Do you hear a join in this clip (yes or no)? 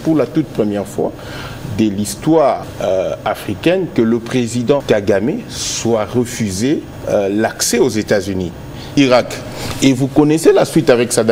yes